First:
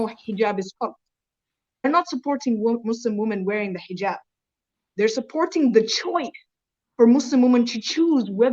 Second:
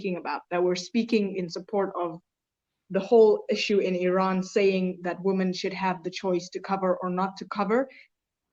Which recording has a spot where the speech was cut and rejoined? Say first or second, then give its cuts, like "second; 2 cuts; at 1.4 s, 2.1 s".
first; 1 cut; at 1.8 s